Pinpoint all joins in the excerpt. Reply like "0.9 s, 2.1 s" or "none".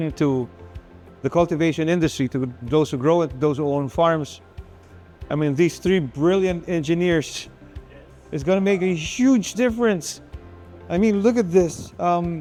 none